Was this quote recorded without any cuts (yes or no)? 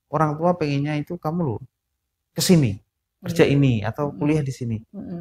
yes